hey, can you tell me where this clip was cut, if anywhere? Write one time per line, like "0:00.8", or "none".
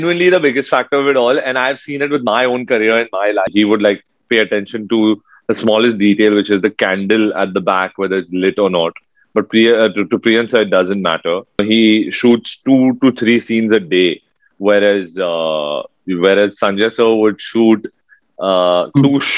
0:03.5
0:11.6